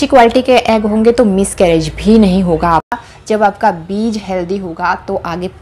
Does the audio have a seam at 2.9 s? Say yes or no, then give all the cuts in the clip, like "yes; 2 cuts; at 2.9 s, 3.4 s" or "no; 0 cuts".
yes; 1 cut; at 2.9 s